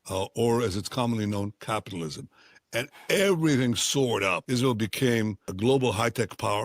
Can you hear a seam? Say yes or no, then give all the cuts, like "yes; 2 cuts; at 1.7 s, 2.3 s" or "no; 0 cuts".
yes; 2 cuts; at 4.4 s, 5.5 s